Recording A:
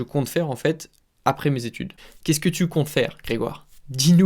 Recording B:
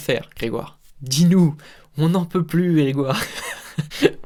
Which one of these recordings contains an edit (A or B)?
A